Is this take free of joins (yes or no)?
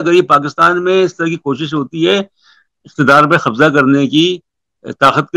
yes